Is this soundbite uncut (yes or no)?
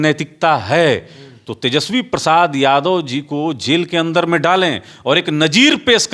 yes